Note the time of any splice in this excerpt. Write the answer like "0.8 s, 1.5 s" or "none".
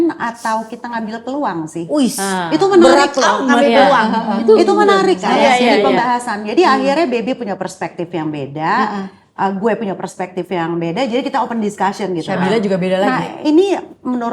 none